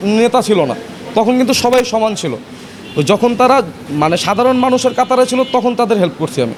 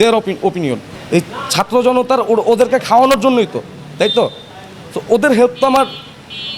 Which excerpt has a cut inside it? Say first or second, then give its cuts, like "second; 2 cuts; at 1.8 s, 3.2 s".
second; 1 cut; at 0.9 s